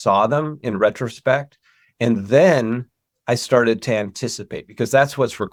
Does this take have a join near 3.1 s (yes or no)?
no